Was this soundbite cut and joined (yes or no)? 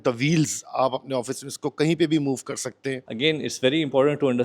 yes